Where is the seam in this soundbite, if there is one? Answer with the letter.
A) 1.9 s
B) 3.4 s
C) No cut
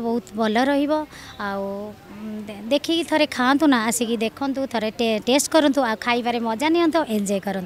C